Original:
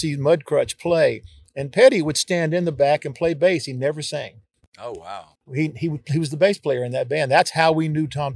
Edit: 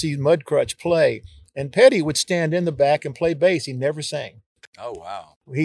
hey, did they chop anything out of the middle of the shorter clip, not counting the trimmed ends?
no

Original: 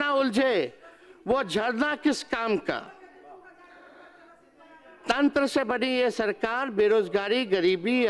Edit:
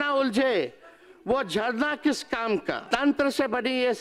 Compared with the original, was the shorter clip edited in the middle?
yes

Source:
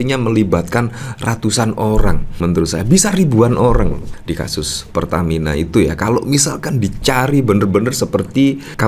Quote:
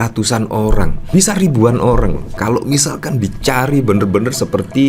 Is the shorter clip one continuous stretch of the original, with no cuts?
no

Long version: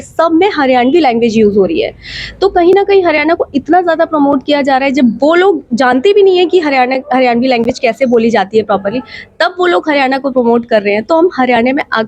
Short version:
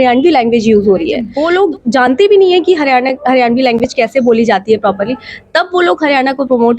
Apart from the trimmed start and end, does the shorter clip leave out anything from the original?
yes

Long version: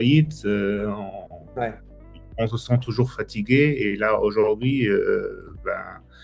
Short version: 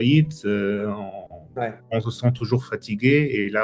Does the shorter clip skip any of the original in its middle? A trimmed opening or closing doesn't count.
yes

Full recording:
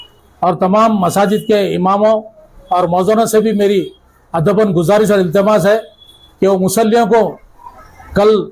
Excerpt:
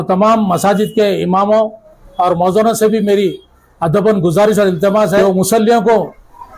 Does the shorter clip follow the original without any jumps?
no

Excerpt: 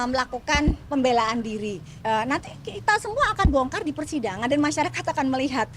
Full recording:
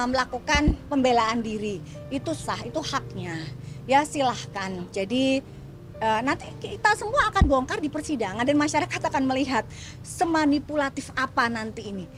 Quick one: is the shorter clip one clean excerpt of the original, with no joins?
no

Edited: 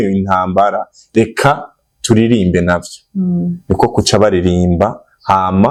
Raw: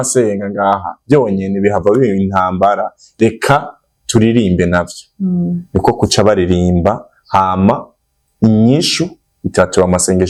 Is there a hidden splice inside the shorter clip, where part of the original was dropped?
no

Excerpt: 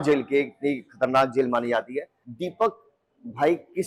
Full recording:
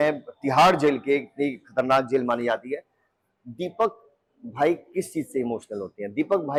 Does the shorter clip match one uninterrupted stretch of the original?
no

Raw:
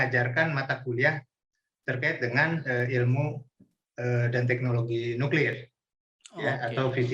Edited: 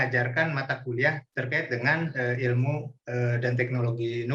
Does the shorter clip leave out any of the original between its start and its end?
yes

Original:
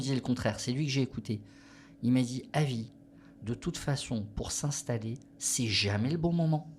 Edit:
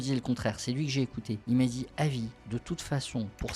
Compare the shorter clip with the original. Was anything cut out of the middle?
yes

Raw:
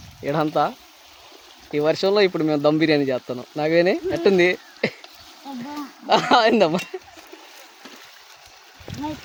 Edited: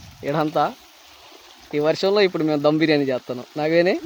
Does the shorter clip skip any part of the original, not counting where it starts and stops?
no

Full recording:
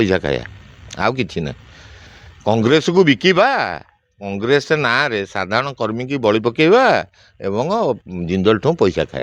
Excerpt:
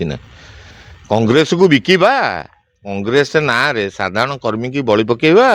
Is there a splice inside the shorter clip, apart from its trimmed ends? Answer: no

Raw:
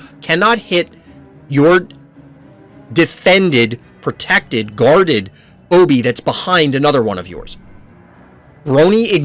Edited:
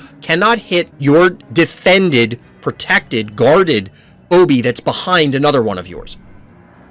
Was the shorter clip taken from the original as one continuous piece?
no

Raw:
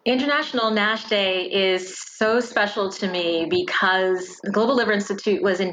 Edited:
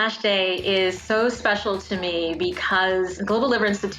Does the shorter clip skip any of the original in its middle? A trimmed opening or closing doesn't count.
yes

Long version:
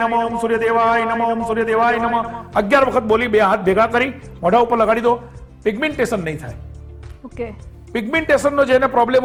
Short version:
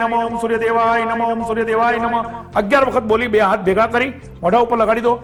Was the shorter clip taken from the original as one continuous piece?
yes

